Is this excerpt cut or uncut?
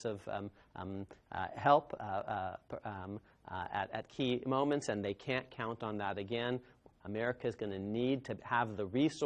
uncut